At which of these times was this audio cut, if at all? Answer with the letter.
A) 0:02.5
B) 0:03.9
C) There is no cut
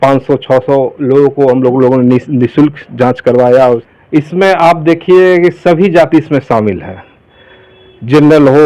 B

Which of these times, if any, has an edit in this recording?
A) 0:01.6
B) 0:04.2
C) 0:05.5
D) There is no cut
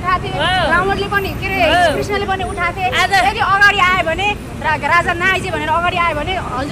D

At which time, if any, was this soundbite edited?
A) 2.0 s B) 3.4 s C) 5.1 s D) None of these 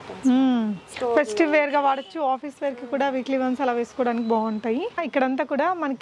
C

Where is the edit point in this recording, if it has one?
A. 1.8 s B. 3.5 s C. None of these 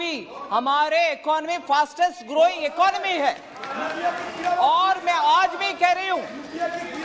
C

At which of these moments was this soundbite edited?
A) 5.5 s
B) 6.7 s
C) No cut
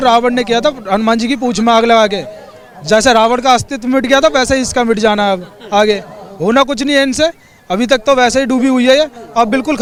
C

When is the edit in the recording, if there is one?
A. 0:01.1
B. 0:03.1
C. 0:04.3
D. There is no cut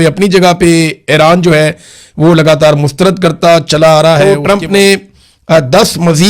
C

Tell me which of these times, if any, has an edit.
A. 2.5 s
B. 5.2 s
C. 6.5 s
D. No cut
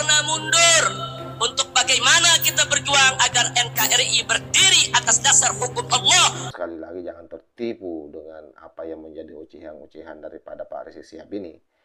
C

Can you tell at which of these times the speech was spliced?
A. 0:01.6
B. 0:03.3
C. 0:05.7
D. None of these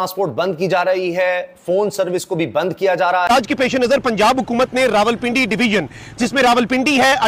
B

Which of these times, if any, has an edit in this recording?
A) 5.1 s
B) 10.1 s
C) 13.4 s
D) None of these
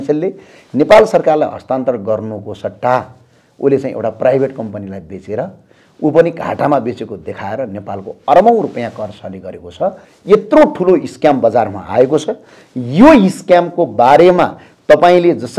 B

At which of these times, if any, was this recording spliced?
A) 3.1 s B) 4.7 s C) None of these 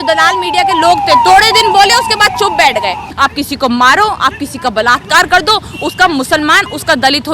A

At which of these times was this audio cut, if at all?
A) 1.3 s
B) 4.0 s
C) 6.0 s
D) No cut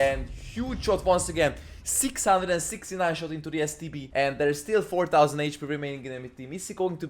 B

